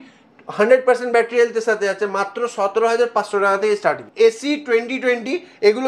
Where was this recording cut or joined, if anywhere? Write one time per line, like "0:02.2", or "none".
0:04.0